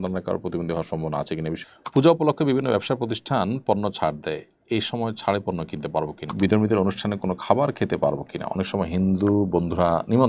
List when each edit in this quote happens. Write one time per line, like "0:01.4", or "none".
0:01.6
0:06.3